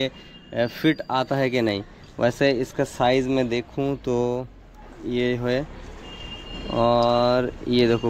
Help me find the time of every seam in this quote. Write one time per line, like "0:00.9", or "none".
none